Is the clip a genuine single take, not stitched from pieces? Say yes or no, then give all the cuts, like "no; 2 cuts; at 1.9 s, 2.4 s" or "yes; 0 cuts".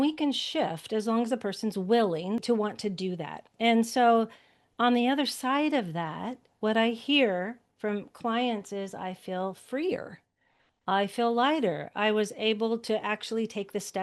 no; 2 cuts; at 2.4 s, 3.5 s